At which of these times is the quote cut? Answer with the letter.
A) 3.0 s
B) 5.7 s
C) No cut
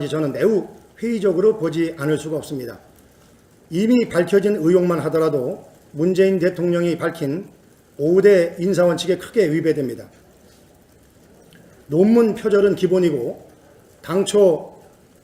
C